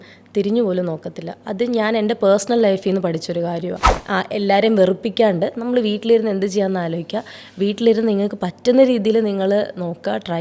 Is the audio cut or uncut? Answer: cut